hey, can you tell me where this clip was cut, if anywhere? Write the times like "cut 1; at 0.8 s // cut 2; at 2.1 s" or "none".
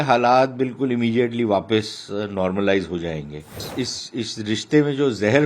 cut 1; at 3.6 s